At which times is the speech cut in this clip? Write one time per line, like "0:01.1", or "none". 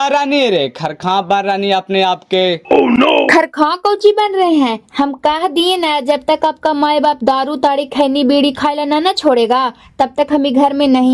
none